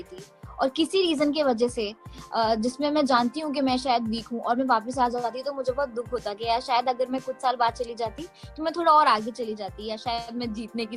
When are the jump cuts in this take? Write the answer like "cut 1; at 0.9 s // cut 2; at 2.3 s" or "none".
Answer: none